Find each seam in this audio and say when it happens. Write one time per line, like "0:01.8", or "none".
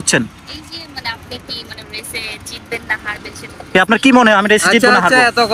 none